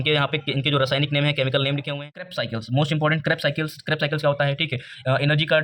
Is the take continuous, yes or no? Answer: no